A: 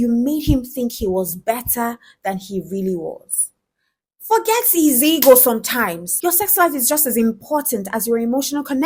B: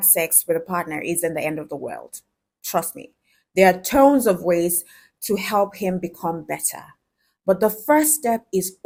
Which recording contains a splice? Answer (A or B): A